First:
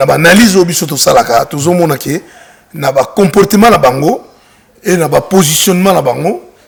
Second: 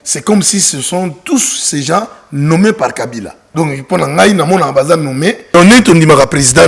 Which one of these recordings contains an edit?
second; 2 cuts; at 3.5 s, 5.5 s

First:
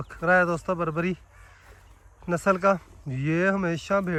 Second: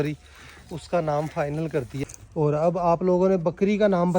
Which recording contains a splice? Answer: second; 1 cut; at 1.9 s

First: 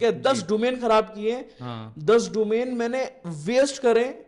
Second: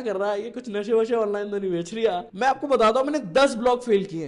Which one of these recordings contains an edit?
second; 1 cut; at 2.3 s

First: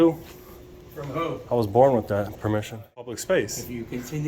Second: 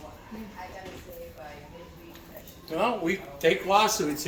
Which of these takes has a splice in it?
first; 1 cut; at 3.2 s

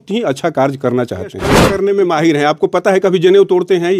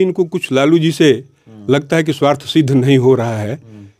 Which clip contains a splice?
first; 1 cut; at 1.7 s

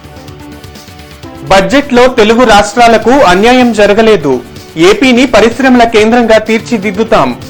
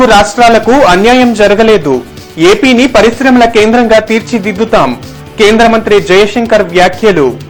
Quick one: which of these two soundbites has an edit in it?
first; 1 cut; at 1.5 s

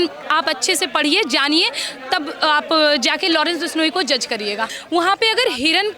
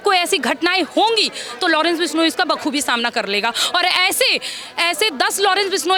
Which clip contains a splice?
first; 1 cut; at 4.7 s

